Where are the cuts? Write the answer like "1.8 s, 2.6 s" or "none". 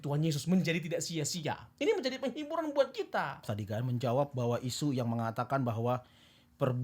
3.5 s